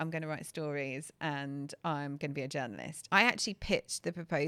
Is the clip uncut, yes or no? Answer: no